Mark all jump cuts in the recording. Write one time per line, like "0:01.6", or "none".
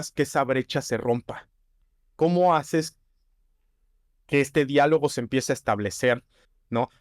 none